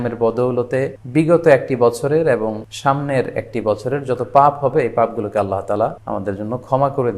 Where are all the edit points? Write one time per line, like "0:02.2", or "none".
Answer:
0:01.0
0:02.7
0:06.0

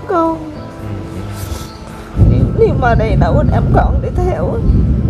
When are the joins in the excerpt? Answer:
0:02.1

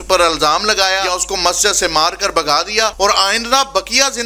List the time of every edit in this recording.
0:01.1
0:02.9

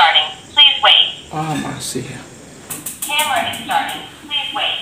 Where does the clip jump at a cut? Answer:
0:02.7

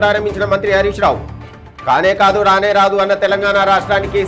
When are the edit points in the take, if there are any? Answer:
none

